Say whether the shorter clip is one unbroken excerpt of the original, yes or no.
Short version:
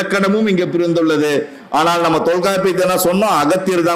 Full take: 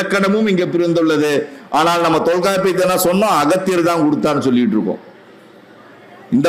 yes